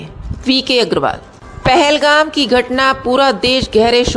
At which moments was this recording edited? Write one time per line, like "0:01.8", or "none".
0:01.5